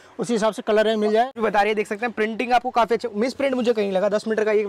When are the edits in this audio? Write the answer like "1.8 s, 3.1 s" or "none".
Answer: 1.3 s